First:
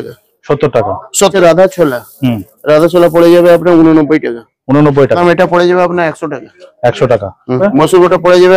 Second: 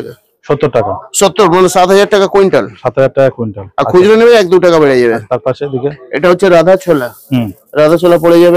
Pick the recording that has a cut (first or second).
first